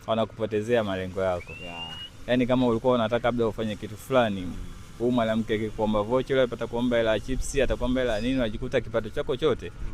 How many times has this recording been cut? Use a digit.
0